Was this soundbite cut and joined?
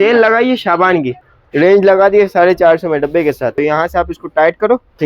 yes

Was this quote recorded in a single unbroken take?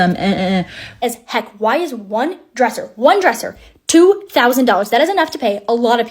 no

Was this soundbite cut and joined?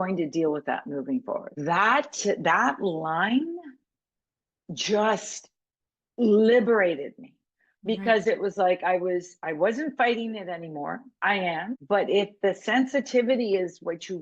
yes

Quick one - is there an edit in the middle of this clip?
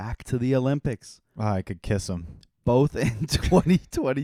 no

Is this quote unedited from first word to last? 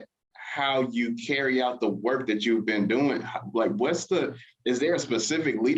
yes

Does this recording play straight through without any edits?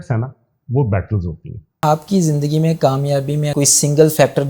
no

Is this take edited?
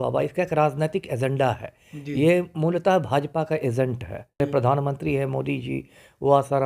yes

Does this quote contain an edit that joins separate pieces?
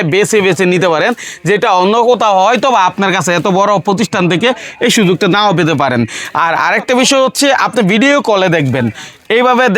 no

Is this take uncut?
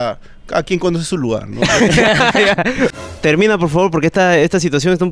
no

